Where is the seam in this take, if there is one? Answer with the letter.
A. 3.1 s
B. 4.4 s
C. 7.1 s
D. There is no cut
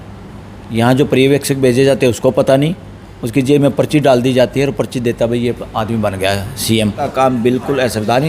C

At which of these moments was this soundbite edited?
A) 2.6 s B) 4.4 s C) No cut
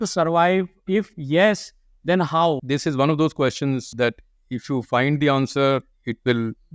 A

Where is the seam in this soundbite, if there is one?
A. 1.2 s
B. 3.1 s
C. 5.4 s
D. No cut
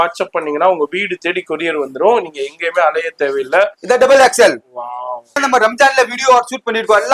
C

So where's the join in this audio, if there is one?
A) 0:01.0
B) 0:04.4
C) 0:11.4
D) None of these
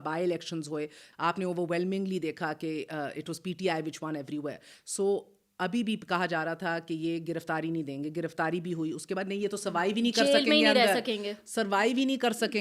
A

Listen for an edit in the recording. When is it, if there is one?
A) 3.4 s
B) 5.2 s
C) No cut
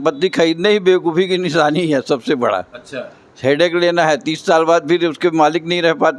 C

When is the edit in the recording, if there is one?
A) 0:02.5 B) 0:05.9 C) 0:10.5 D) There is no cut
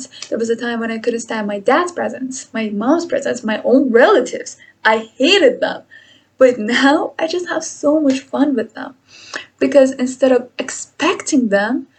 D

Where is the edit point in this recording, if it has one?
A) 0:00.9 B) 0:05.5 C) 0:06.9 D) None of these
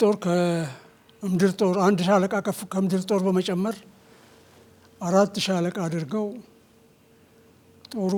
D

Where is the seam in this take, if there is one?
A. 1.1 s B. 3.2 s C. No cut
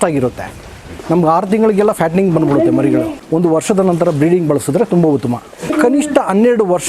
B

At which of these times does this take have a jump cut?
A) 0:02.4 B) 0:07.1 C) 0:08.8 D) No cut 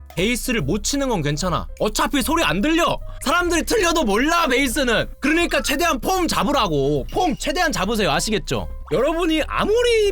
D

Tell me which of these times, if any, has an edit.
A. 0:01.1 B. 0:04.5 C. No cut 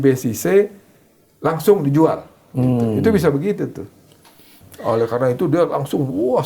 B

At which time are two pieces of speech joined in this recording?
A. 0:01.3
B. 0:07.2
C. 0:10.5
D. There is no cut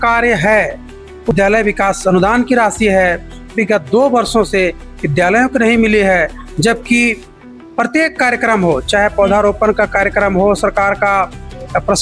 A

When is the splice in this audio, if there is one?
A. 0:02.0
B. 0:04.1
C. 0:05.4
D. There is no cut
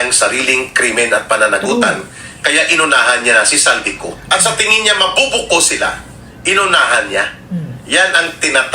B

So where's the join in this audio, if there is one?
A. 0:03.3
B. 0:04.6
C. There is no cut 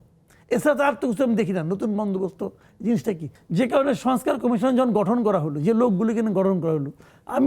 A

